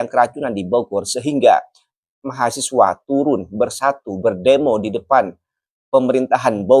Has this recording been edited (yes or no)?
no